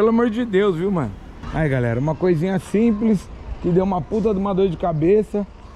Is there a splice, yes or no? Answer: no